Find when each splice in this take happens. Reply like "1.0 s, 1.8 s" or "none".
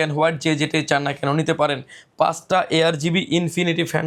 none